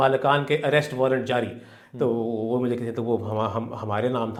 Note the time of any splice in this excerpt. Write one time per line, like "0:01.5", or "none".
none